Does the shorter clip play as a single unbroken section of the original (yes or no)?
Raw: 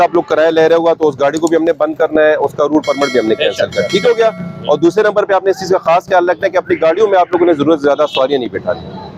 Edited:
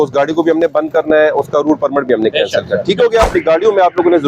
no